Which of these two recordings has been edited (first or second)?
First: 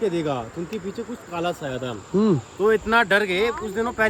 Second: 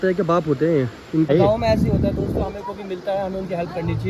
second